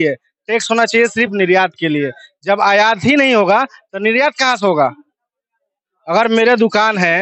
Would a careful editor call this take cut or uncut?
uncut